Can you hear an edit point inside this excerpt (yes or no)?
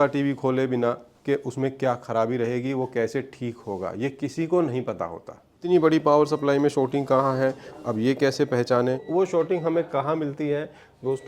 yes